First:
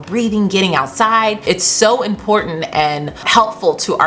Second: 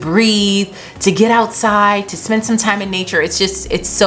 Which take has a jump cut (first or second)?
first